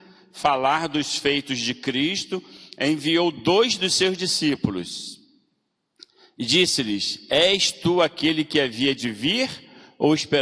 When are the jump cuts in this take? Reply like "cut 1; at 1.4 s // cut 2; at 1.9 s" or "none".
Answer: none